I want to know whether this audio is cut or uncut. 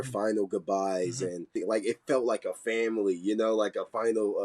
cut